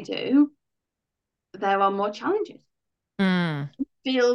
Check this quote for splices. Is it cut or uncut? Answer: uncut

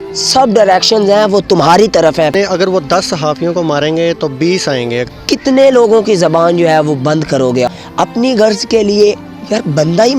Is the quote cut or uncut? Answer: cut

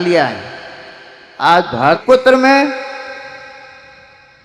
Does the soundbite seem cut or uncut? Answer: cut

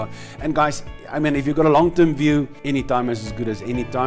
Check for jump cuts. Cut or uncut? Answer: cut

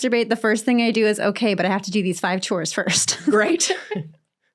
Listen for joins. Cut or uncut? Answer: uncut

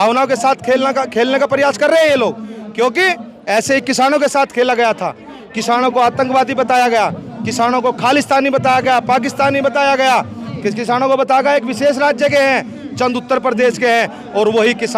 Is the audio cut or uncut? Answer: uncut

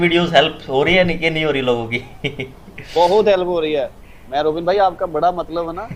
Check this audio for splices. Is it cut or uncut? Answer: uncut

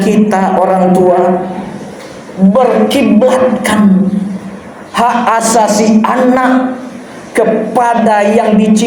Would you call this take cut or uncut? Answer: uncut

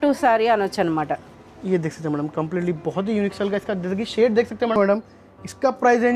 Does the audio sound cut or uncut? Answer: cut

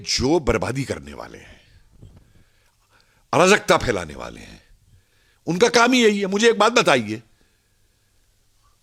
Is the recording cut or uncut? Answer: uncut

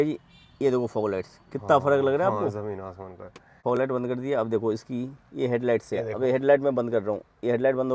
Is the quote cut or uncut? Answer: cut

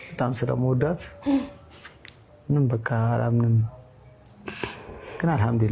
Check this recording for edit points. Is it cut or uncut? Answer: uncut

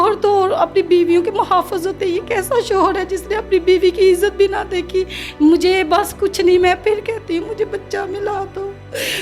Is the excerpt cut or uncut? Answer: cut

